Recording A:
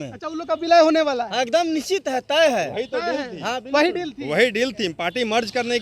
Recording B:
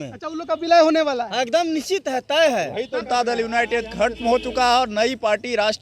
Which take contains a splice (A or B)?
B